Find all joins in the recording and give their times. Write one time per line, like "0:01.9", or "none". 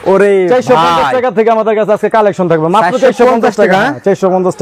none

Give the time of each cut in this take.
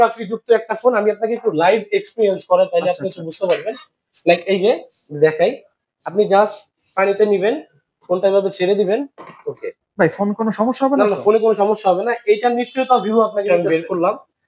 0:13.5

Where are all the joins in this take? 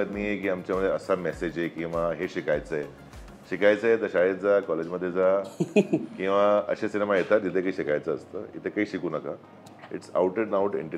none

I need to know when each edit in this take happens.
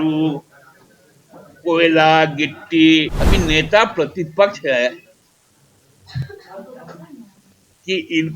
0:03.2

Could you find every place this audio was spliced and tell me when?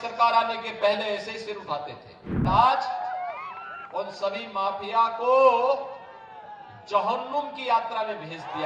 0:02.4

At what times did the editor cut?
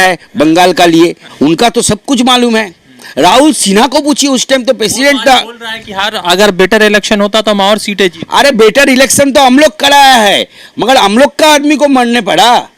0:01.2

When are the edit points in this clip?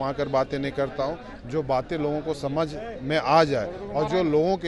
none

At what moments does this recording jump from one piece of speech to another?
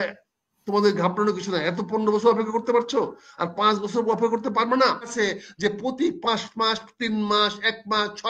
0:05.1

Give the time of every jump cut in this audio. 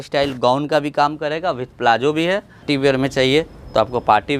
0:02.6

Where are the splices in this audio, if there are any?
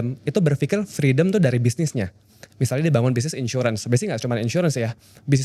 none

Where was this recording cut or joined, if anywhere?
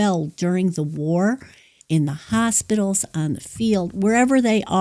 0:01.7

